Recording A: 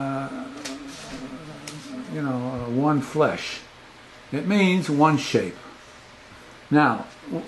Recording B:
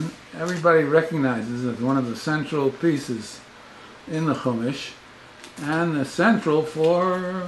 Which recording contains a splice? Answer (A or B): A